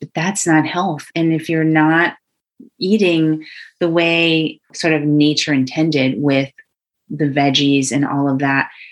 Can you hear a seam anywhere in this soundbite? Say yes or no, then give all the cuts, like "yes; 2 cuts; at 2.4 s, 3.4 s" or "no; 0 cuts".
yes; 2 cuts; at 1.1 s, 4.7 s